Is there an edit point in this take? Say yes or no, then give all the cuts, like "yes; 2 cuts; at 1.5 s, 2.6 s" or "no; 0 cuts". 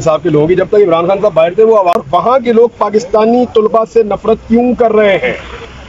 yes; 1 cut; at 1.9 s